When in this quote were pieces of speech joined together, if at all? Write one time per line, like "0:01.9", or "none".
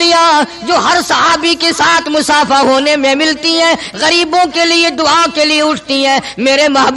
none